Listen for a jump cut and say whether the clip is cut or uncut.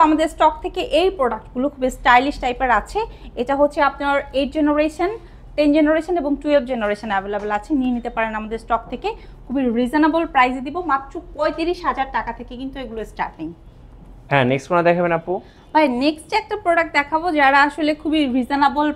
uncut